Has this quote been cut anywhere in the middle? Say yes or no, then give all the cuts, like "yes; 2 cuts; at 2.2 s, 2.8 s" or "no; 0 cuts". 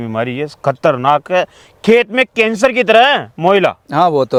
no; 0 cuts